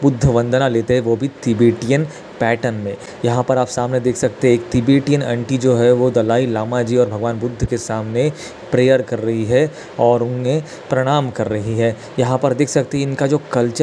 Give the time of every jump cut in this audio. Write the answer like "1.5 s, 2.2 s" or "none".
none